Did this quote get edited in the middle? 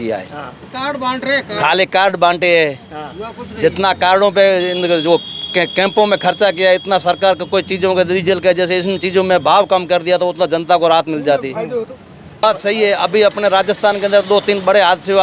yes; 1 cut; at 12.4 s

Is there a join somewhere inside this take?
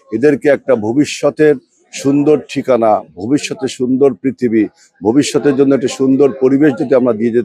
no; 0 cuts

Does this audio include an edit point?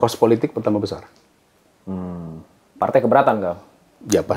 no; 0 cuts

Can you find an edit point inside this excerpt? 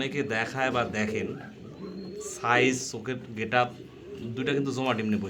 no; 0 cuts

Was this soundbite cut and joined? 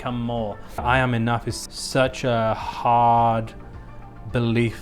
yes; 2 cuts; at 0.8 s, 1.5 s

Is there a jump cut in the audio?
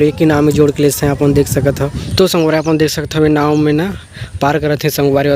yes; 1 cut; at 2.1 s

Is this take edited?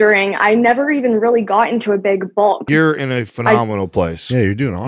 yes; 1 cut; at 2.7 s

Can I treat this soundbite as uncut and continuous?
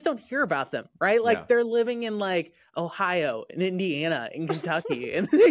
yes; 0 cuts

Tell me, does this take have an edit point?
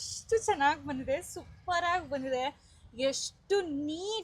no; 0 cuts

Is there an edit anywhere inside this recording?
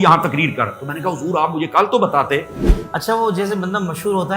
yes; 1 cut; at 2.6 s

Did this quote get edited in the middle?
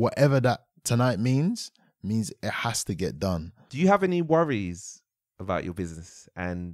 yes; 1 cut; at 3.6 s

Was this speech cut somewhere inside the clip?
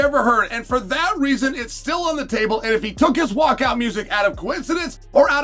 no; 0 cuts

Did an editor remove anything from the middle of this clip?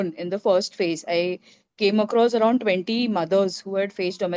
no; 0 cuts

